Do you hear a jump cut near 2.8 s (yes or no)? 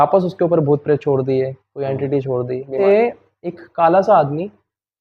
yes